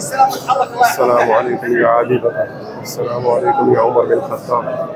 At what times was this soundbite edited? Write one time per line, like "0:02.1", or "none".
none